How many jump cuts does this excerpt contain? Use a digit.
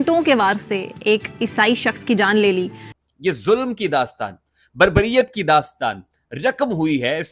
1